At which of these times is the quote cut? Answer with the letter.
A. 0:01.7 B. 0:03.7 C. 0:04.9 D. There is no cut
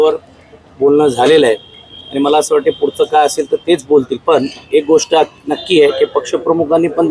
D